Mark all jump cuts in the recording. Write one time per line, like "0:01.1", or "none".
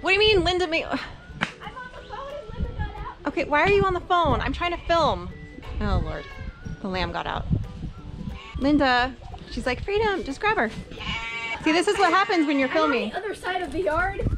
none